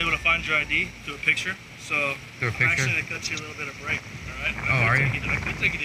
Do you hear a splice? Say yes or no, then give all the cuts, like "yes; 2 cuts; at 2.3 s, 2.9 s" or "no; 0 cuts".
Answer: no; 0 cuts